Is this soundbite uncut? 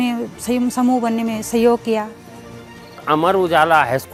yes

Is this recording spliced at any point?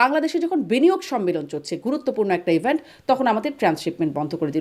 no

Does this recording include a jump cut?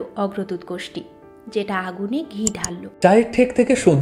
yes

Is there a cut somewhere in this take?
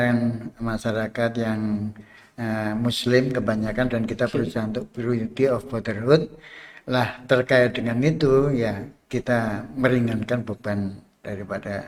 no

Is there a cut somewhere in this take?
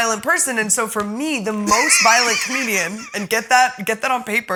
no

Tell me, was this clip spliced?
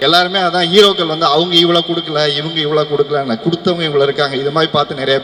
no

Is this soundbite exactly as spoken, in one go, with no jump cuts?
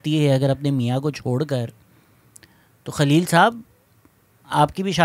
yes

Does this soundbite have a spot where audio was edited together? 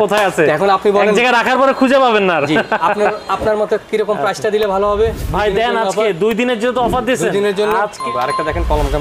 yes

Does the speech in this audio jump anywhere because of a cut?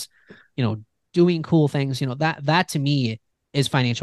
no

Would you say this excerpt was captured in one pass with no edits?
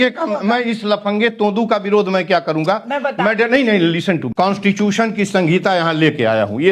no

